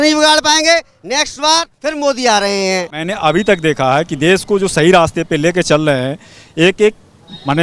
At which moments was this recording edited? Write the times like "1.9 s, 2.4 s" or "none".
3.0 s